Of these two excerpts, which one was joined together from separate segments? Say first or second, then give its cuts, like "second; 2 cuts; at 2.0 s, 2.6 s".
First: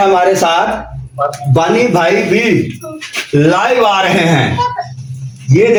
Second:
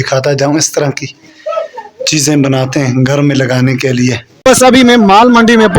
second; 1 cut; at 4.3 s